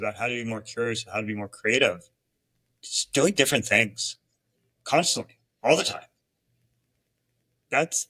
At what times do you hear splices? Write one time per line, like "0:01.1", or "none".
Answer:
none

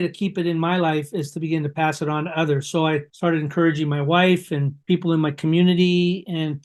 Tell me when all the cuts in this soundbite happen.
none

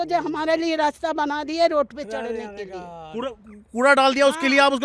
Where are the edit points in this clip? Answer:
none

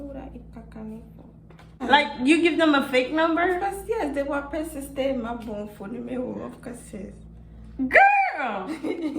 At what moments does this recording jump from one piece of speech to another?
0:01.8

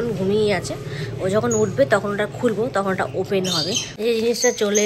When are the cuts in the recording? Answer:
0:03.9

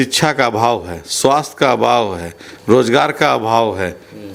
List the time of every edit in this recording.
none

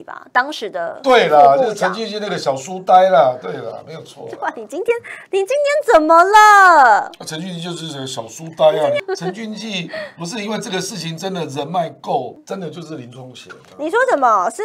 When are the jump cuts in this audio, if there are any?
0:09.0
0:12.4

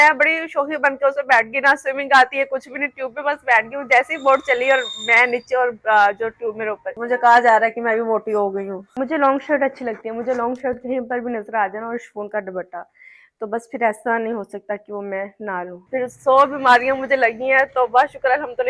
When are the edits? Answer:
0:06.9
0:08.8
0:15.7

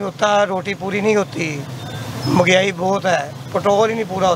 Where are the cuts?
none

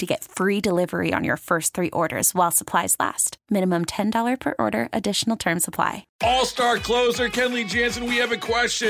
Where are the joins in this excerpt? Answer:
0:06.0

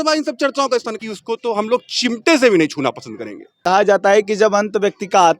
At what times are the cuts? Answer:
0:01.0
0:03.6

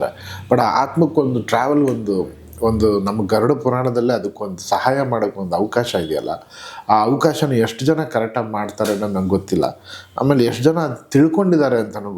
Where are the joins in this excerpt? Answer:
none

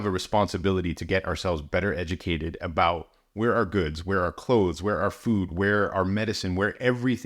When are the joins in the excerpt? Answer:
none

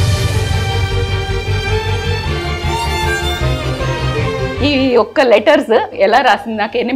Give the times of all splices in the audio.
0:04.3
0:05.9

